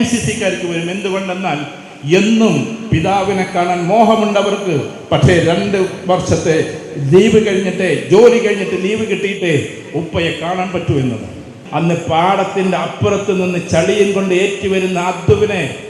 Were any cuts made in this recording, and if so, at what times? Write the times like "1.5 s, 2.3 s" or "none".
11.6 s